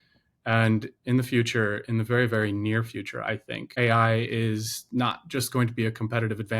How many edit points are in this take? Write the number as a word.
one